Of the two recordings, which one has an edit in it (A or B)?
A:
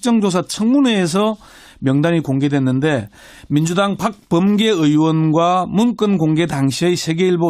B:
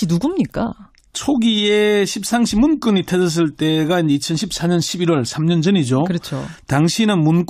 A